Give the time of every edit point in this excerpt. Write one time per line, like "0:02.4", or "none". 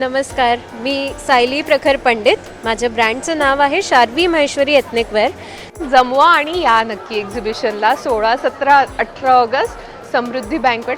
0:05.8